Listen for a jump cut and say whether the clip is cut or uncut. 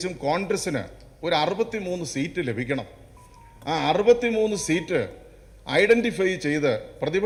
uncut